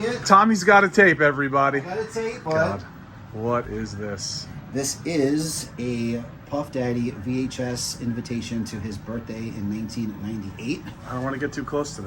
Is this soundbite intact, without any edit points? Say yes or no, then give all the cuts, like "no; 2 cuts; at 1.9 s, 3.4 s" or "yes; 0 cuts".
no; 1 cut; at 2.4 s